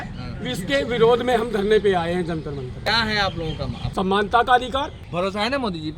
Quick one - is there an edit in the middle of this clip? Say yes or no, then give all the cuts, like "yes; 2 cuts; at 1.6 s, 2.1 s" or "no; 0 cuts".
yes; 3 cuts; at 2.9 s, 3.8 s, 5.0 s